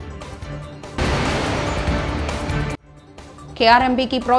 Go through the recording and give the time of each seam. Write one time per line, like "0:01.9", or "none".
0:01.0
0:02.9